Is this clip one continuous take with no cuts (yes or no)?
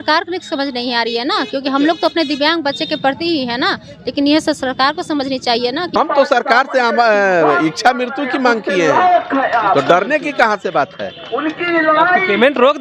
no